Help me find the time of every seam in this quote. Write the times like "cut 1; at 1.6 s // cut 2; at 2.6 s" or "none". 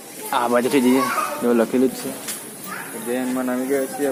none